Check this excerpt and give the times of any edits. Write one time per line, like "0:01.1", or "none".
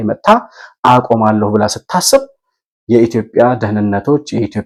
none